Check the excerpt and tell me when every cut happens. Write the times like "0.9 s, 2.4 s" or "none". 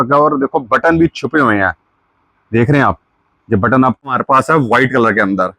4.1 s